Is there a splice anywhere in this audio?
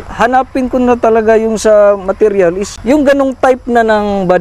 yes; 1 cut; at 2.7 s

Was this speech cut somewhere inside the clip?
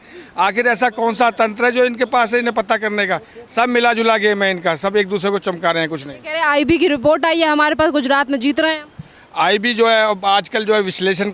no; 0 cuts

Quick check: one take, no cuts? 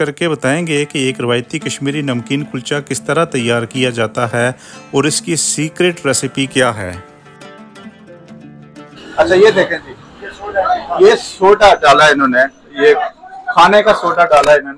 yes; 0 cuts

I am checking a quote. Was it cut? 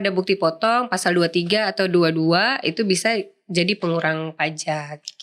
no; 0 cuts

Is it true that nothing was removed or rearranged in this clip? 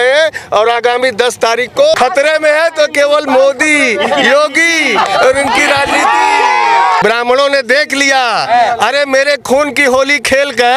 no; 2 cuts; at 1.9 s, 7.0 s

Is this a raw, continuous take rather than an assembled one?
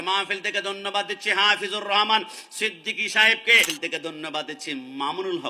no; 1 cut; at 3.7 s

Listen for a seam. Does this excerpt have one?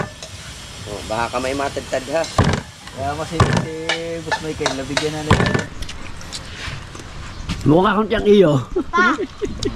yes; 1 cut; at 5.7 s

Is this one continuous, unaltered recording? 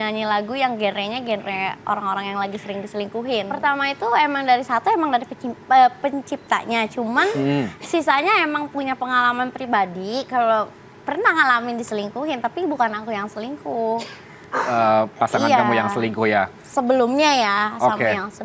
no; 1 cut; at 3.5 s

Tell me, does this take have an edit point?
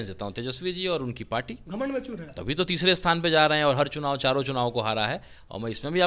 no; 0 cuts

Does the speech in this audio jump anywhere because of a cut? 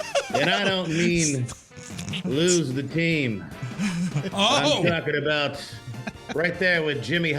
no; 0 cuts

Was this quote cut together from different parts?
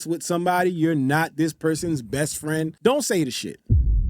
no; 0 cuts

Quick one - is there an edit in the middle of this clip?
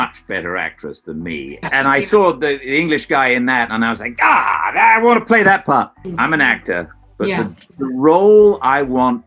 yes; 2 cuts; at 1.7 s, 6.0 s

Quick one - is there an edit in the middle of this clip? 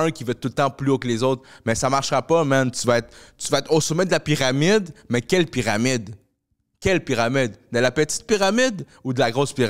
no; 0 cuts

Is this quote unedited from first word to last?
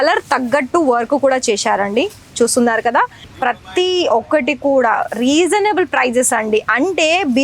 no; 1 cut; at 3.2 s

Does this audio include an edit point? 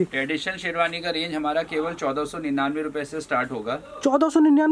no; 0 cuts

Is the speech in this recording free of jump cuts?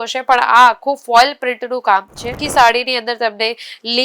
no; 1 cut; at 2.4 s

